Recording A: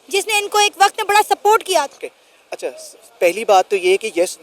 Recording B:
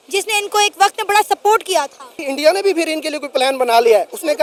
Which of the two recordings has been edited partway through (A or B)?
A